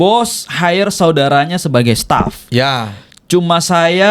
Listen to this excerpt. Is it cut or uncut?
uncut